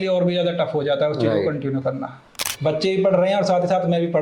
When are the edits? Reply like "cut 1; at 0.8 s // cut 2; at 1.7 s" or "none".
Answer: cut 1; at 2.3 s